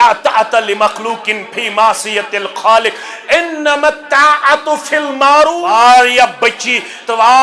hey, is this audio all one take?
no; 1 cut; at 5.6 s

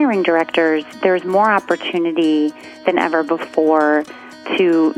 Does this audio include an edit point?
no; 0 cuts

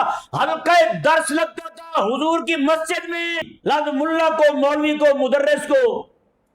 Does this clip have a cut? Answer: yes; 1 cut; at 3.5 s

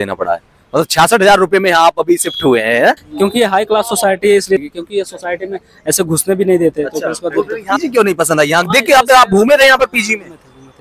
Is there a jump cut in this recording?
yes; 3 cuts; at 3.1 s, 4.6 s, 7.7 s

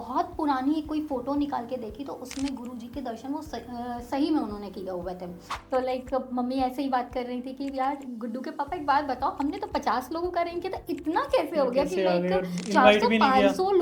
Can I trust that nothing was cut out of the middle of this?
no; 1 cut; at 5.5 s

